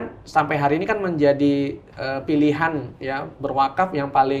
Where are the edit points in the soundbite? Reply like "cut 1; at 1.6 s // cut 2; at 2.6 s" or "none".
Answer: none